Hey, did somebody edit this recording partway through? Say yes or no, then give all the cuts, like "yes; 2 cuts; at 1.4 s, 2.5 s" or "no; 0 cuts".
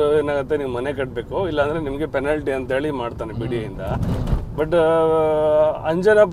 no; 0 cuts